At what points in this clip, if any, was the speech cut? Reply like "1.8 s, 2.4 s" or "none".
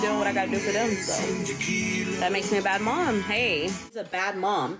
3.9 s